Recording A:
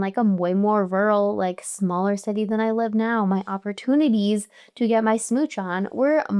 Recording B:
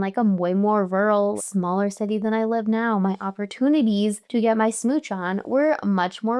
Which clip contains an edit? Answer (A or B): B